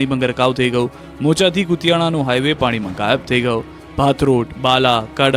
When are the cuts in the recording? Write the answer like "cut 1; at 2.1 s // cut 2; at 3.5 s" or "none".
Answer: none

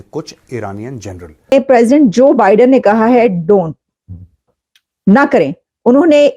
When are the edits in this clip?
cut 1; at 1.5 s

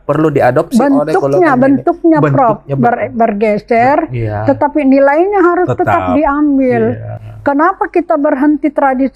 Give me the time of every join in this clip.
none

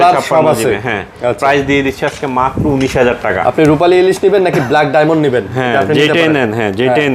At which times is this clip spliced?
none

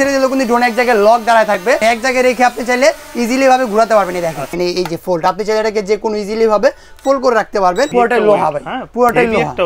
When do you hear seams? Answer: cut 1; at 1.8 s // cut 2; at 4.5 s // cut 3; at 7.9 s

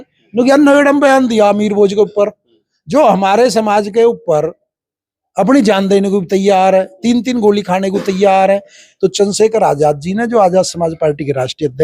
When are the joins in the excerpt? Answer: cut 1; at 8.8 s

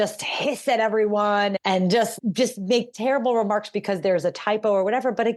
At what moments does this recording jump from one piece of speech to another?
none

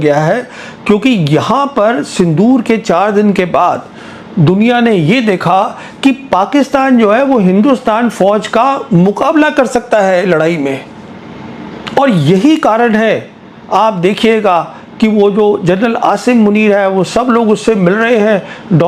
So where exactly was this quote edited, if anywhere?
none

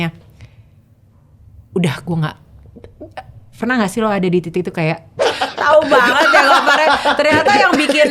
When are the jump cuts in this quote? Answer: cut 1; at 5.2 s

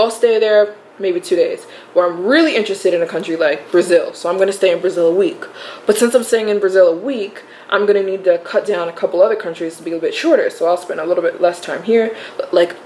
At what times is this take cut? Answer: none

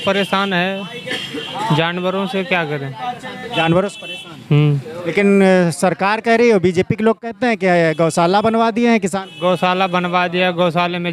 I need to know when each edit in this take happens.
none

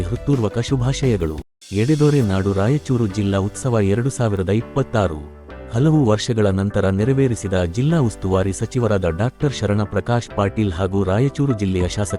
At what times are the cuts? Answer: cut 1; at 1.6 s

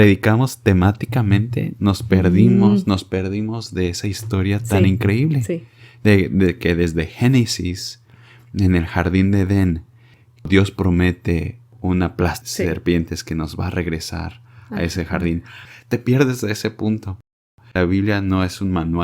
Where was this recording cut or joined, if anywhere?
cut 1; at 10.4 s // cut 2; at 15.6 s // cut 3; at 17.3 s

